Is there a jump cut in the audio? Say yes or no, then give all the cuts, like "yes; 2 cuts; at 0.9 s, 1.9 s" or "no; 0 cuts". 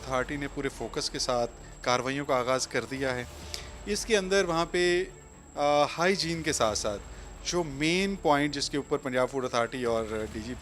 no; 0 cuts